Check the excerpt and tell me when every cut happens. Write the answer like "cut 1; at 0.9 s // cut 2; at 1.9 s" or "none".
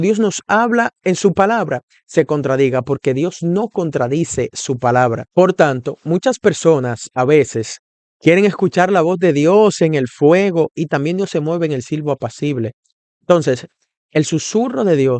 cut 1; at 5.2 s